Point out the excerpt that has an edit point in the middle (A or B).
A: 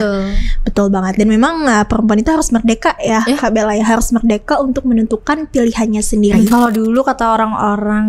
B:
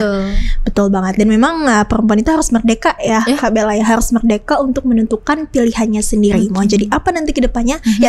A